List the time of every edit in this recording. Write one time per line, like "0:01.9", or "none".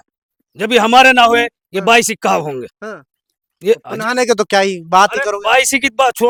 none